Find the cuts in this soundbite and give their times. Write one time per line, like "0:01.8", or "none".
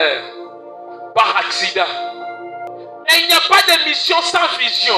0:02.7